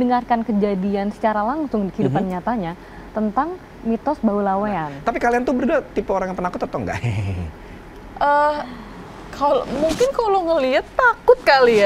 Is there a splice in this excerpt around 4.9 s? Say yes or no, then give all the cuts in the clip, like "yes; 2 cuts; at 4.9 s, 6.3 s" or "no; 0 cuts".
yes; 1 cut; at 4.9 s